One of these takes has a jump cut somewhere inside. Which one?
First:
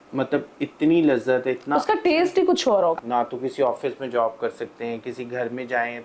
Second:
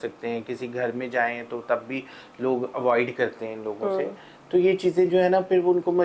first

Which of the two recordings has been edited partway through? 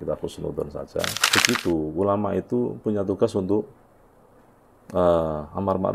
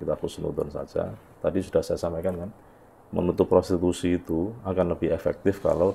first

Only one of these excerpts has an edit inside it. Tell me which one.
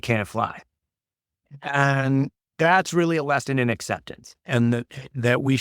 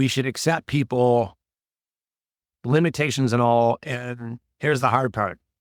first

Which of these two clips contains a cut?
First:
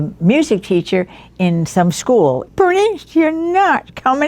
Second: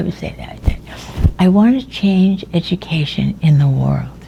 first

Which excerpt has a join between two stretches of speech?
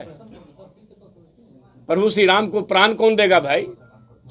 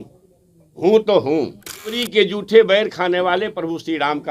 second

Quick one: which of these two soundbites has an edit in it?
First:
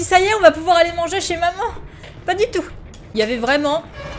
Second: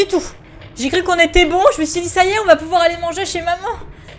first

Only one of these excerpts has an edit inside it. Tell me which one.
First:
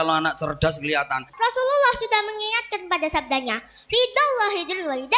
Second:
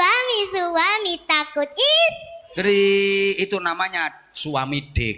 first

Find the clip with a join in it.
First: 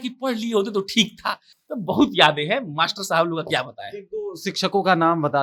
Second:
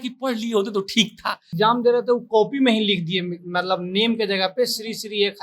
second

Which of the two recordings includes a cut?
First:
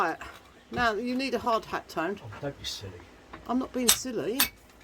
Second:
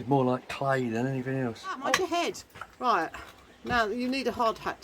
second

